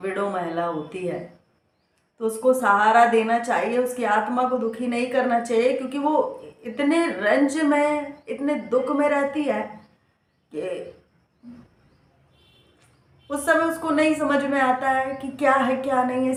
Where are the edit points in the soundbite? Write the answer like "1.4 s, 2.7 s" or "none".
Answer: none